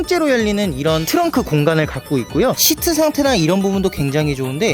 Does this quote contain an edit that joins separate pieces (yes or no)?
yes